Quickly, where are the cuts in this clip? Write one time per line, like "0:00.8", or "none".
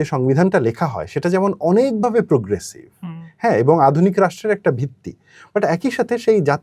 none